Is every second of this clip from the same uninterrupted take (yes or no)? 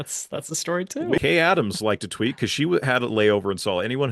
no